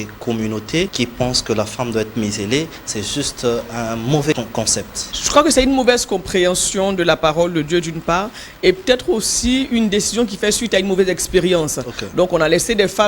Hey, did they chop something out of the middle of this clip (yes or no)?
yes